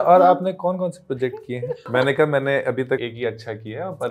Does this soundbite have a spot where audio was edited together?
yes; 2 cuts; at 1.9 s, 3.0 s

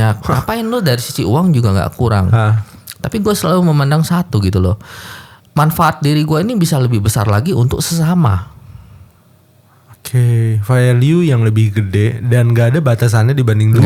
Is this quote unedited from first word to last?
yes; 0 cuts

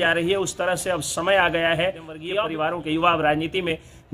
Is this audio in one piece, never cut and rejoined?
no; 1 cut; at 2.2 s

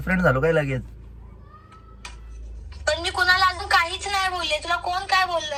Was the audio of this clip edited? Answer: no; 0 cuts

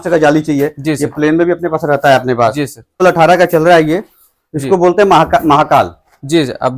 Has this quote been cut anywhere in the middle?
yes; 1 cut; at 3.0 s

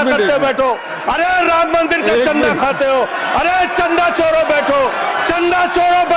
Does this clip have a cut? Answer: no; 0 cuts

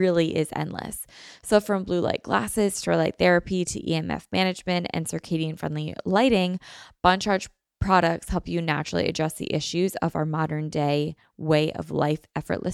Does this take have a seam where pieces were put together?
no; 0 cuts

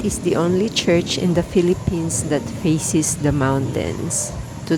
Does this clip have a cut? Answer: no; 0 cuts

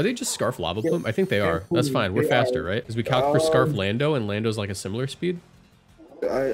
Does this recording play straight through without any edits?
no; 1 cut; at 2.9 s

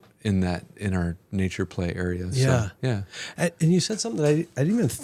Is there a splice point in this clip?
no; 0 cuts

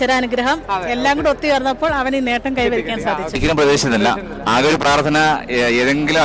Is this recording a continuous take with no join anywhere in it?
no; 1 cut; at 3.4 s

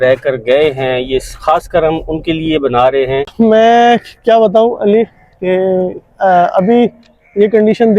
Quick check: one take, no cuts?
no; 1 cut; at 3.3 s

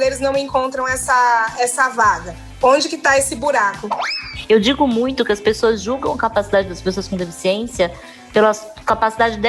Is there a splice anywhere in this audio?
yes; 1 cut; at 4.1 s

